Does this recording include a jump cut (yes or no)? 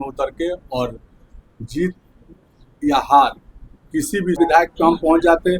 yes